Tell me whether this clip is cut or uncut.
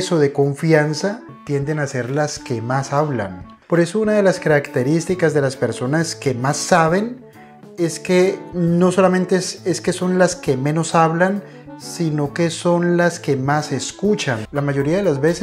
cut